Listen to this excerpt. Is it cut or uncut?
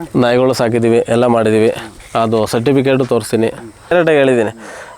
cut